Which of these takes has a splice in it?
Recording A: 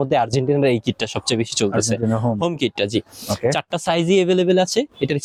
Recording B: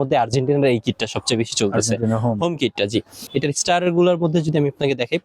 B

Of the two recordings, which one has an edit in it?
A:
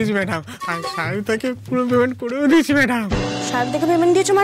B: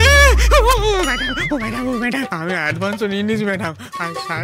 B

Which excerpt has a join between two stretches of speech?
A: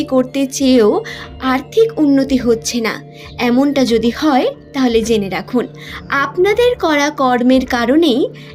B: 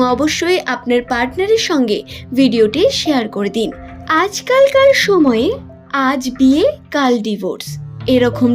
B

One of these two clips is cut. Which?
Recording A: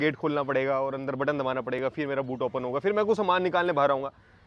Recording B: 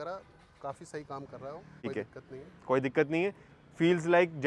B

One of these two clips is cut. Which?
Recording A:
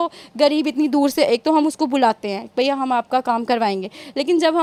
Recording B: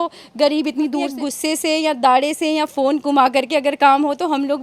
B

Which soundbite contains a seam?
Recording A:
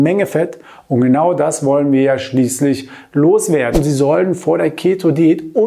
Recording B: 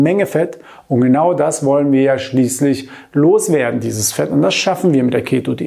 A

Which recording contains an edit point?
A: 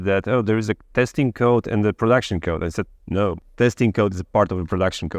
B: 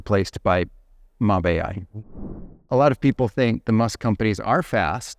B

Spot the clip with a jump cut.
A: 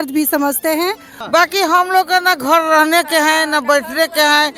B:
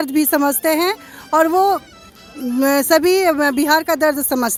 A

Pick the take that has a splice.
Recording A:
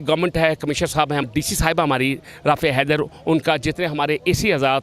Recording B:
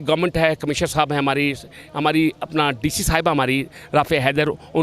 A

